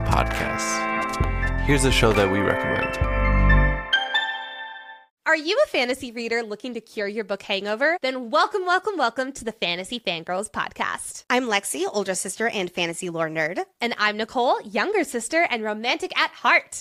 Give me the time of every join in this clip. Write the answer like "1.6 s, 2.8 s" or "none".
none